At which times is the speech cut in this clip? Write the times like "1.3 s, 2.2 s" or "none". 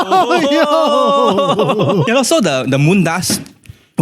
2.0 s

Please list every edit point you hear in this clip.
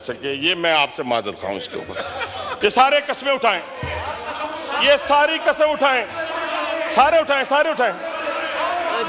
2.5 s

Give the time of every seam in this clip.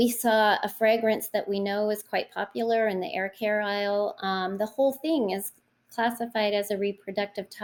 none

